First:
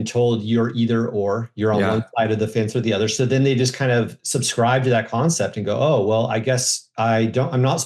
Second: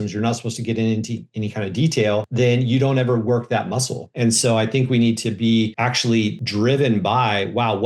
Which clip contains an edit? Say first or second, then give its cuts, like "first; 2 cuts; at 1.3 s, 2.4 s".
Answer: second; 3 cuts; at 2.3 s, 4.0 s, 6.0 s